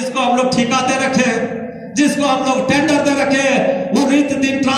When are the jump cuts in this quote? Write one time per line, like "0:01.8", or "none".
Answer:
none